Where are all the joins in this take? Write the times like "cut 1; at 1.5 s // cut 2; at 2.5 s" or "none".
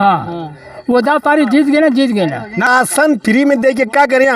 cut 1; at 2.7 s